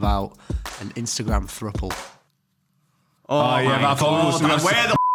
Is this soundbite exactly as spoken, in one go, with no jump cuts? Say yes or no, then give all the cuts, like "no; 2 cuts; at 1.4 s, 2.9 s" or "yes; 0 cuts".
yes; 0 cuts